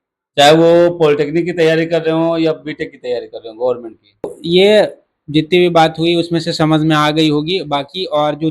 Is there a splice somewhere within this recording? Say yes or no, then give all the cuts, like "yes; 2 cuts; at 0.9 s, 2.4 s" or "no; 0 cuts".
yes; 1 cut; at 4.4 s